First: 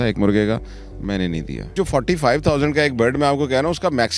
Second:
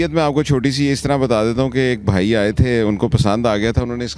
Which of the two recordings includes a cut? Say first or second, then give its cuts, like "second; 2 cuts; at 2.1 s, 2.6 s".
first; 1 cut; at 1.7 s